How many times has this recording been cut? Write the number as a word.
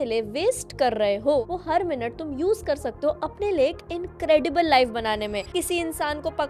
two